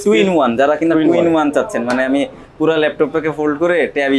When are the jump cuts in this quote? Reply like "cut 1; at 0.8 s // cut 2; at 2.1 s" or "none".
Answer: none